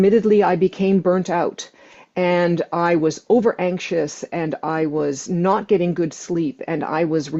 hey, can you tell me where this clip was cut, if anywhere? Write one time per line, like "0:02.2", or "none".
none